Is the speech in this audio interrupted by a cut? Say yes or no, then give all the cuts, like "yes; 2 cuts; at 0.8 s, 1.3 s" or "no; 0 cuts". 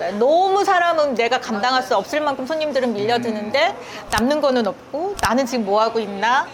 no; 0 cuts